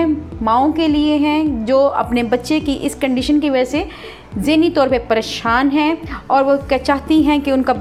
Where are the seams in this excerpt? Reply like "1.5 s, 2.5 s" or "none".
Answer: none